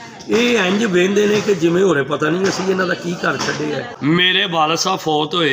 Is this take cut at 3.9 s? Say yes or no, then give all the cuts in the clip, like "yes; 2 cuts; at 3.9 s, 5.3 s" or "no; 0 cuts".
yes; 1 cut; at 3.9 s